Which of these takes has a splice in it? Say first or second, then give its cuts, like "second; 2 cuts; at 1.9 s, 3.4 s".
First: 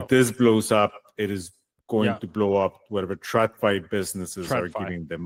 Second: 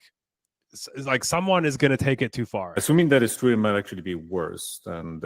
second; 1 cut; at 2.8 s